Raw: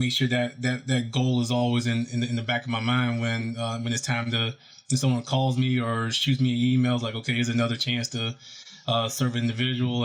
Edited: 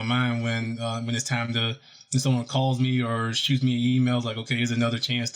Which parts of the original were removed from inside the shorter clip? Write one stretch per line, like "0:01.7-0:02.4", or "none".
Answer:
none